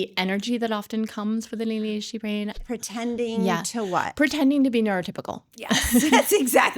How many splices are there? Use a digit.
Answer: 1